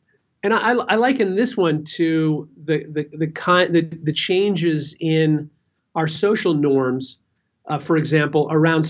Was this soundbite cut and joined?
no; 0 cuts

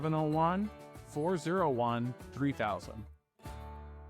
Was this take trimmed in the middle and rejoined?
yes; 1 cut; at 3.0 s

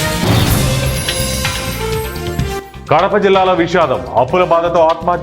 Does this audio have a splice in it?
no; 0 cuts

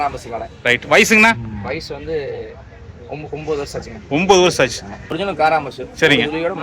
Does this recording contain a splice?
yes; 1 cut; at 5.2 s

